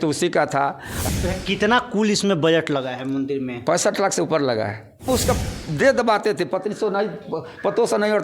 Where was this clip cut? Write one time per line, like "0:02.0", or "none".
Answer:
0:01.1
0:05.1